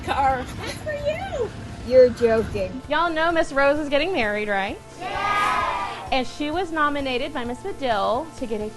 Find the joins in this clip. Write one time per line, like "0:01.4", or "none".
0:02.7